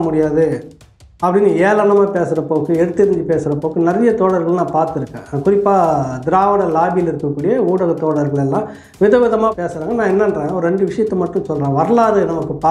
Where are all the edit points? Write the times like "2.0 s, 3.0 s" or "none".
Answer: 9.5 s